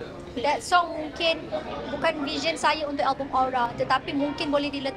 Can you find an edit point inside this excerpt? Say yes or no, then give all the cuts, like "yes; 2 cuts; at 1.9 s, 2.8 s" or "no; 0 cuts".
no; 0 cuts